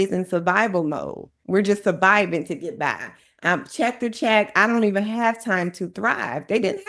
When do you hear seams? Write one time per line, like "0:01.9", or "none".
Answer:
0:01.3